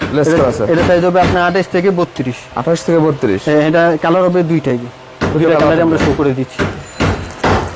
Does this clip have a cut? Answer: no; 0 cuts

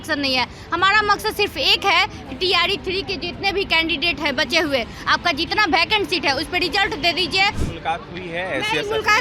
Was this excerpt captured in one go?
no; 1 cut; at 7.6 s

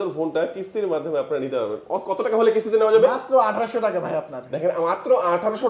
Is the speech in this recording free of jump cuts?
no; 1 cut; at 2.0 s

